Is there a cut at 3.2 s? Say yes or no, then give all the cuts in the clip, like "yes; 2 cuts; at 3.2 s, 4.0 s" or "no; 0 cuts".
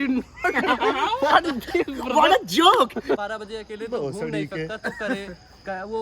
yes; 1 cut; at 3.2 s